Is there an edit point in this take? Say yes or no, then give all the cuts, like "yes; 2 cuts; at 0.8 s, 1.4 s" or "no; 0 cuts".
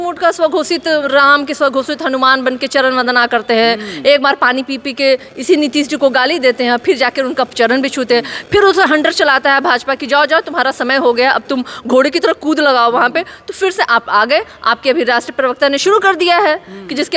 no; 0 cuts